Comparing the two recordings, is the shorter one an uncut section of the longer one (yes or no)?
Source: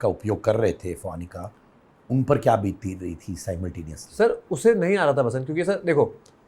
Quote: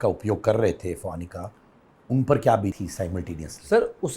no